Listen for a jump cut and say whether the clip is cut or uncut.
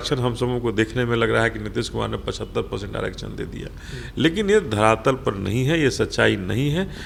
uncut